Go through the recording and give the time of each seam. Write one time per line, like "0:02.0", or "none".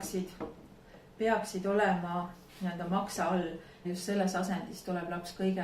0:03.8